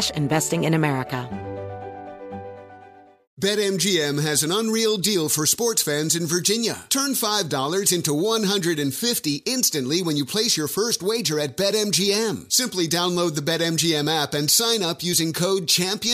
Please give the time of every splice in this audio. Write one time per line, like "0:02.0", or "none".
0:01.2

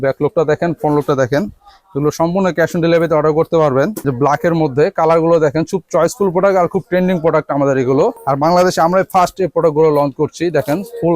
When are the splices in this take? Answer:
0:04.0
0:08.2

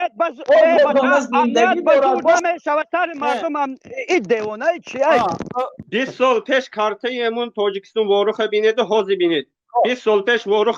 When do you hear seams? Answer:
0:05.8

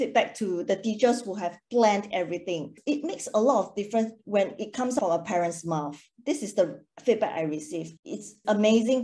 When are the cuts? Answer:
0:05.0

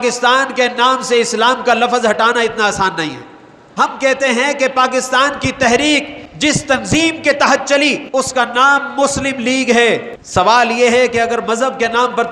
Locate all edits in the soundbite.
0:03.6
0:06.2
0:08.0
0:10.2

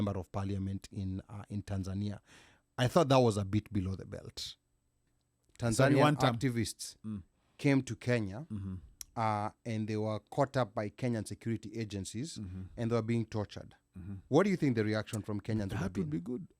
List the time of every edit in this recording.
0:05.2

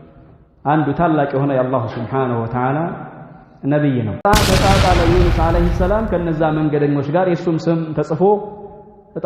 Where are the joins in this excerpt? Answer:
0:04.3

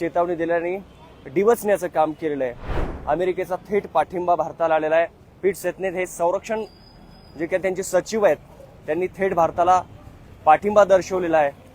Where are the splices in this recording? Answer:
0:02.9

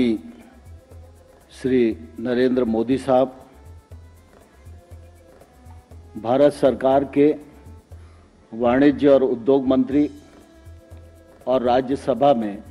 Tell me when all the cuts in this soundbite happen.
none

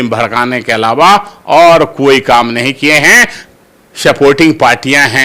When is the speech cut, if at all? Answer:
0:03.4

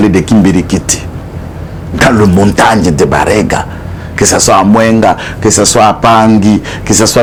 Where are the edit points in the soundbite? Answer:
none

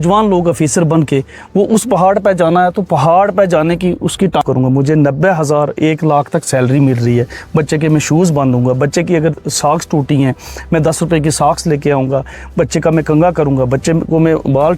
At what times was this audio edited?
0:04.4

